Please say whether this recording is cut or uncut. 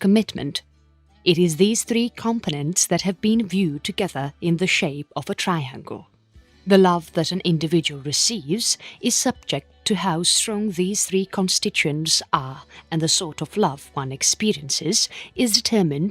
cut